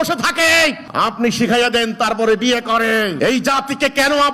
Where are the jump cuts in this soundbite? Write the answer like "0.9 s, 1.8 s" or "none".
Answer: 0.8 s, 3.1 s